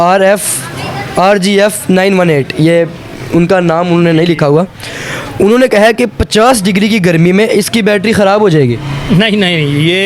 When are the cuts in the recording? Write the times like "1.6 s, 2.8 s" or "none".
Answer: none